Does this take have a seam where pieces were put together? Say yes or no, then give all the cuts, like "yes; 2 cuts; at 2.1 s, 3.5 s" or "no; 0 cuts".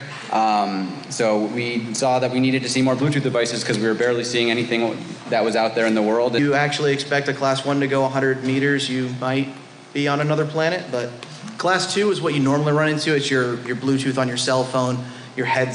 no; 0 cuts